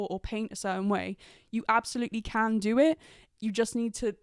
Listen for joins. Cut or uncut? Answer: uncut